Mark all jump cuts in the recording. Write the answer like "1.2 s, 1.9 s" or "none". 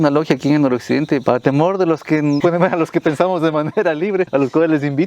1.2 s, 2.4 s, 4.3 s